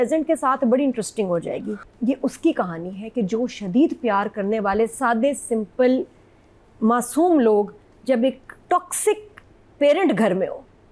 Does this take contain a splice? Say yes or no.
yes